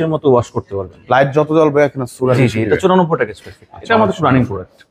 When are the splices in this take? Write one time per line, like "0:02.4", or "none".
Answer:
none

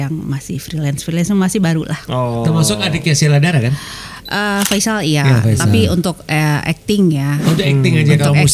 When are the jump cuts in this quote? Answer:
none

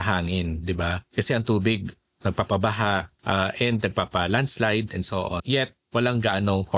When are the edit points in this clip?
0:01.0
0:03.1
0:05.5

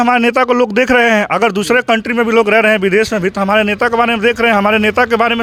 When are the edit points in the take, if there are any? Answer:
none

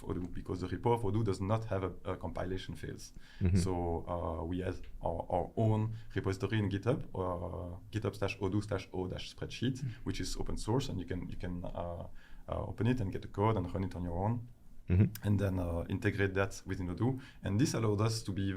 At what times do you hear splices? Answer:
none

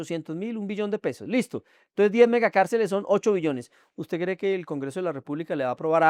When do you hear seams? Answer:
none

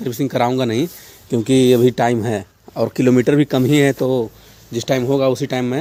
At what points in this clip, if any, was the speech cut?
none

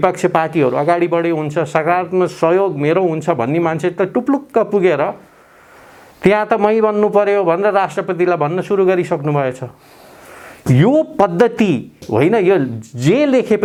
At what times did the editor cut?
none

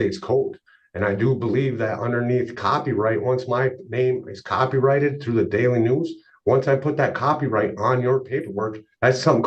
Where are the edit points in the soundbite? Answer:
none

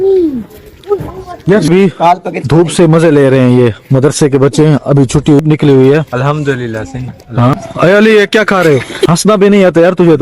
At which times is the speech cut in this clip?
0:01.7
0:05.4
0:07.5
0:09.1

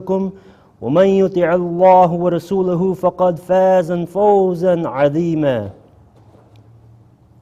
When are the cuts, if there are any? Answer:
0:04.4

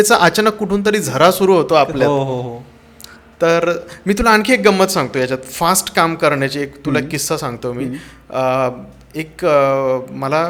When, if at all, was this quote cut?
none

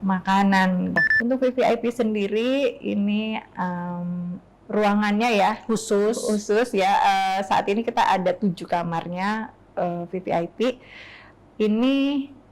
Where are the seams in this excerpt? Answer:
0:01.0

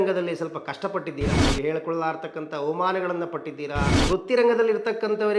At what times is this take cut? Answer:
0:01.4
0:03.9

